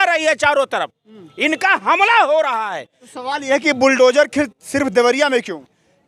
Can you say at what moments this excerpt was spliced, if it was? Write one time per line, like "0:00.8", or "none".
none